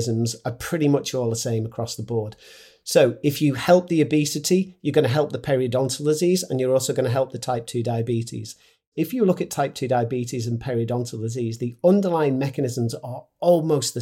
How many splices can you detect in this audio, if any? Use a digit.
1